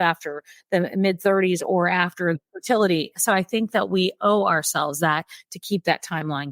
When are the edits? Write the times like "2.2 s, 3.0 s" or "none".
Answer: 2.3 s, 3.1 s